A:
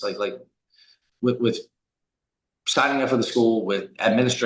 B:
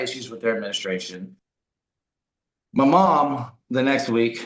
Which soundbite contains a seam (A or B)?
B